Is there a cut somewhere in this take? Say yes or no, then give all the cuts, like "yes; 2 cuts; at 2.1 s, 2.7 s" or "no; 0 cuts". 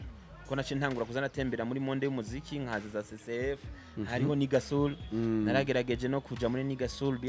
no; 0 cuts